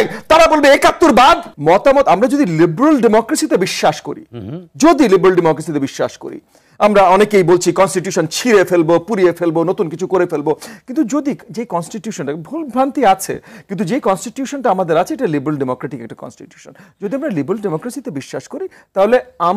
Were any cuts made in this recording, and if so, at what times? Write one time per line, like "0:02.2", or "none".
none

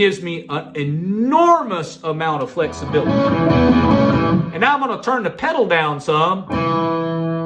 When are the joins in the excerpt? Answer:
0:03.1

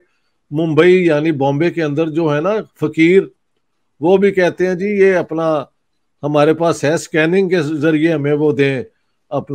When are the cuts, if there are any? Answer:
none

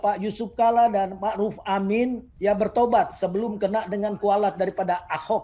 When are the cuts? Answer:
0:02.3

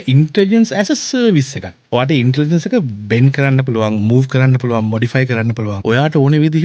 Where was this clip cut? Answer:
0:01.8
0:05.7

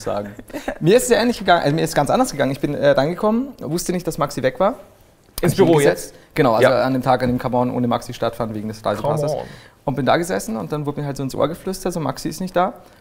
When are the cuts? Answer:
0:08.6

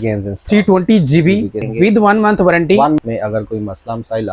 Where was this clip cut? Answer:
0:01.7
0:03.0

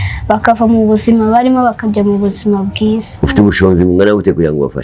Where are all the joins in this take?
0:03.1

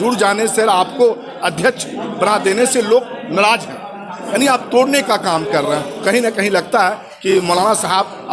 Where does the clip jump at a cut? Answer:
0:06.0

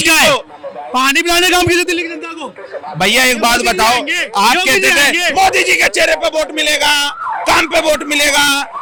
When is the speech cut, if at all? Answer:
none

